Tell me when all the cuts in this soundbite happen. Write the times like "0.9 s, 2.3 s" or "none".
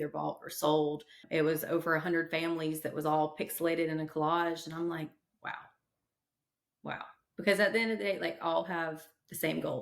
1.2 s